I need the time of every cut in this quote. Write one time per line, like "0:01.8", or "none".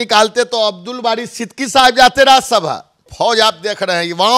0:03.0